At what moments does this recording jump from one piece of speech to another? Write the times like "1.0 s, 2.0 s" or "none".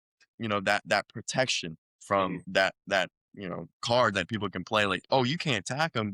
2.4 s, 3.8 s

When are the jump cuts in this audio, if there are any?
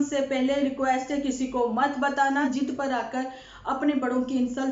2.5 s

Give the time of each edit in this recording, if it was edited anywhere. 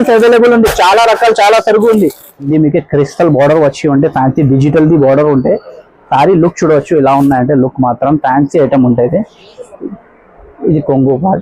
2.5 s

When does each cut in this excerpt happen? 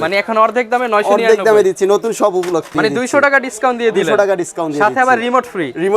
2.7 s

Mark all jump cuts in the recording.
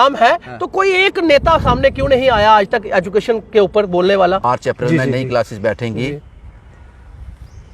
4.4 s

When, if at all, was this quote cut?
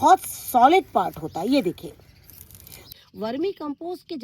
2.8 s

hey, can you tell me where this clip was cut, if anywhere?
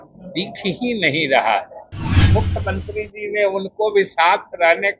2.3 s

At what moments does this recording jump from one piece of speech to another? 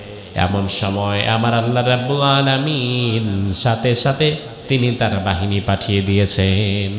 none

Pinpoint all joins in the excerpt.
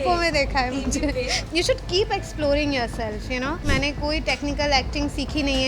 1.5 s, 3.6 s

